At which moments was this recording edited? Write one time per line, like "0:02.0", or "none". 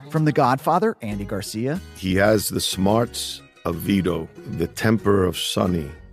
none